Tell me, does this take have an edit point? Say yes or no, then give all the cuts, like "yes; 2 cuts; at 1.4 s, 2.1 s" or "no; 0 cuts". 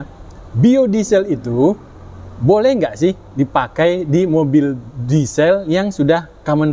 no; 0 cuts